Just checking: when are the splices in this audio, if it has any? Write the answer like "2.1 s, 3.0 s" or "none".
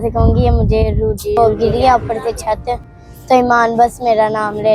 1.4 s